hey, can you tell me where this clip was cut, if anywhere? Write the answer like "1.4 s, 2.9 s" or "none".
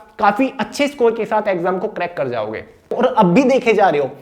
3.0 s